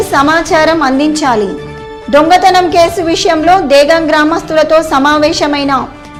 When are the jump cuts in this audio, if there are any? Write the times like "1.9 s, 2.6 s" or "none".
none